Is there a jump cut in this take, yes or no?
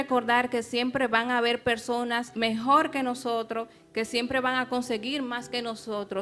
yes